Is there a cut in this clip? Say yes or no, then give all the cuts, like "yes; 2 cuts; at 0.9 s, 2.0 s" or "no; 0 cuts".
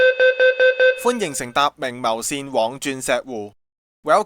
yes; 1 cut; at 1.0 s